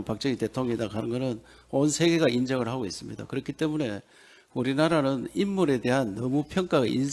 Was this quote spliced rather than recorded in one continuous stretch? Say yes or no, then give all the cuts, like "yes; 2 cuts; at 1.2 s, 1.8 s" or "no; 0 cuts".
no; 0 cuts